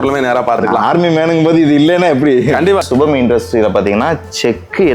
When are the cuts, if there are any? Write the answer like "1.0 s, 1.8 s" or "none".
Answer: 2.8 s